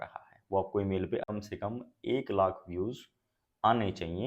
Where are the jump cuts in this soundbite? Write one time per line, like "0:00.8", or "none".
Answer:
0:01.2